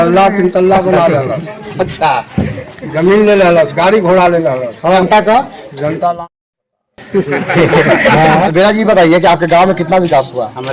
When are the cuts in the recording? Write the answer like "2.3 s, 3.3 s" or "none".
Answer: 5.0 s, 8.5 s